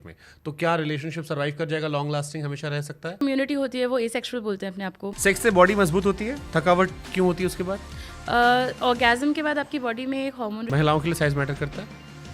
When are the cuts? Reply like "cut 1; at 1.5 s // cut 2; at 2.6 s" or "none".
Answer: cut 1; at 3.2 s // cut 2; at 5.1 s // cut 3; at 10.7 s